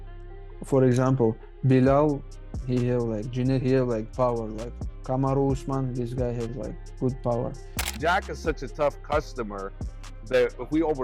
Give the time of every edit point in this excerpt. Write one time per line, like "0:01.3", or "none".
0:07.8